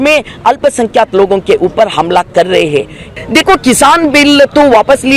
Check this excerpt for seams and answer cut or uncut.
cut